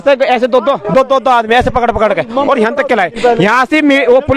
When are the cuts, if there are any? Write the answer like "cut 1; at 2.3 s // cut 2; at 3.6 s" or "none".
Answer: none